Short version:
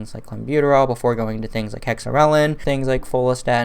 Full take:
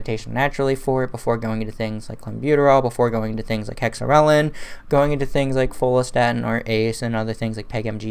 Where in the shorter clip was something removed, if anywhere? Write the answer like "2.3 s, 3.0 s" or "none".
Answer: 2.6 s